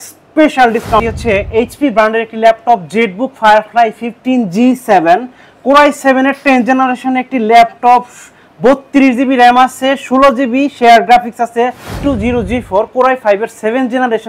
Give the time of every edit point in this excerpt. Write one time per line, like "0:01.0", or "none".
0:01.0
0:11.9